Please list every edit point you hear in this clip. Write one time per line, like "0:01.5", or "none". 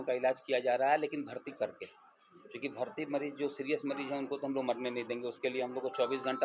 none